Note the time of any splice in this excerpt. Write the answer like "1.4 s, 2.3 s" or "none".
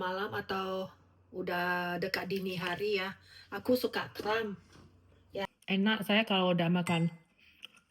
5.4 s